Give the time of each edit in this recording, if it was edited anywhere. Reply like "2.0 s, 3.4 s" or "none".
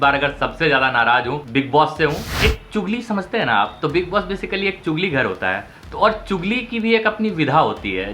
1.4 s, 2.3 s